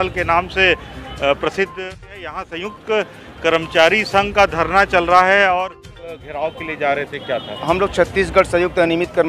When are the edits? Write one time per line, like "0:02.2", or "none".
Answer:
0:01.8
0:06.2